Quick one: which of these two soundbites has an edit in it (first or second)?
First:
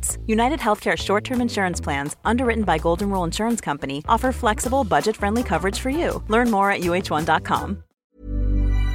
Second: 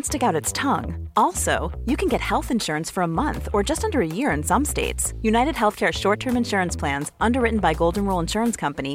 first